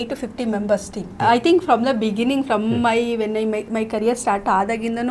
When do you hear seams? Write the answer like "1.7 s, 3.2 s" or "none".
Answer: 1.1 s

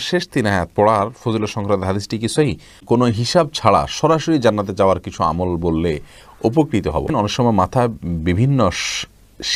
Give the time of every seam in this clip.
2.8 s, 7.1 s

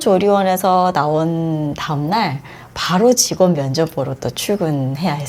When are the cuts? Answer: none

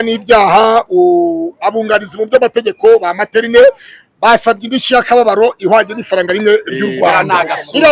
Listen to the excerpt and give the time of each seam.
none

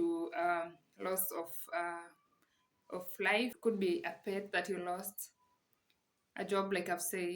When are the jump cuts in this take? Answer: 3.6 s

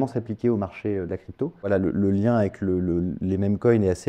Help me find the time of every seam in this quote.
1.7 s

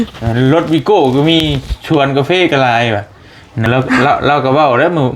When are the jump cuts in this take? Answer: 3.7 s

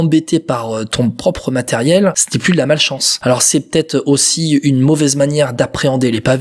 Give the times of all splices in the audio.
2.6 s

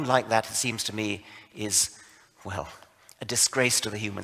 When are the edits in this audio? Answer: none

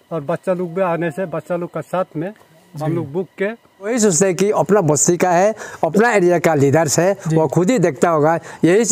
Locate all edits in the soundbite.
3.9 s

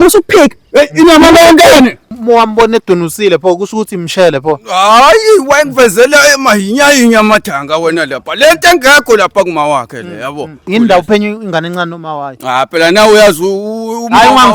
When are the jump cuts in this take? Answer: 2.1 s, 10.6 s

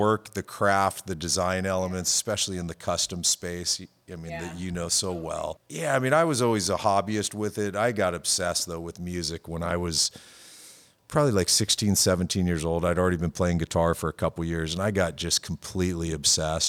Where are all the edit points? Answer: 5.6 s

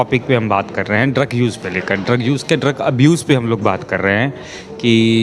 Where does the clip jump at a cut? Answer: none

